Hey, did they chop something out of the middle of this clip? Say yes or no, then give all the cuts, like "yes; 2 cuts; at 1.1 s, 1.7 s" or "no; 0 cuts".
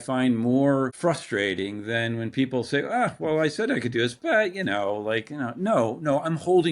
yes; 1 cut; at 0.9 s